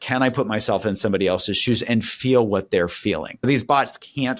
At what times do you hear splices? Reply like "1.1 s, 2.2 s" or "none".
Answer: 3.5 s